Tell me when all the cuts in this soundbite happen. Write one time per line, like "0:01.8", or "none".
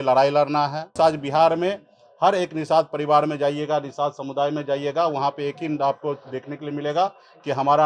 0:00.9